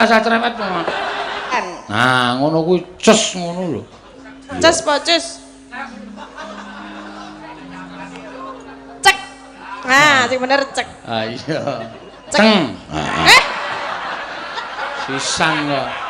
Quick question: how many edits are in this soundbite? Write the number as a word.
one